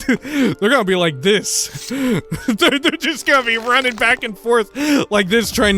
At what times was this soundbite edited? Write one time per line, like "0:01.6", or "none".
0:02.2